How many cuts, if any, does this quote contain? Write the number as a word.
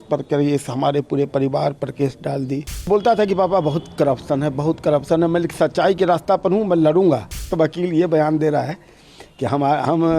two